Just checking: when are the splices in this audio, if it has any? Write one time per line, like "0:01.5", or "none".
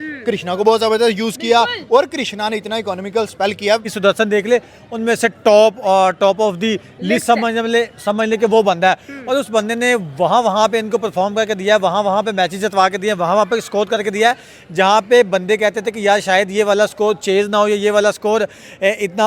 0:03.9